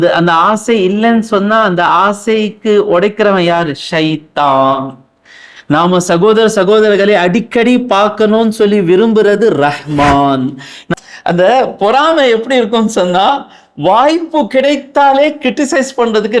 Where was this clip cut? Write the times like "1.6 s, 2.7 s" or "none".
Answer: 10.9 s